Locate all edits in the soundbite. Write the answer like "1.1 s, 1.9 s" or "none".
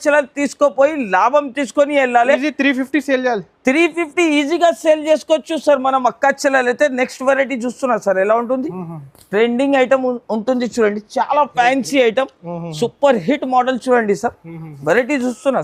none